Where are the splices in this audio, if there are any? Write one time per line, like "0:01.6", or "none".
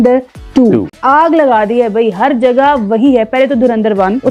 0:00.9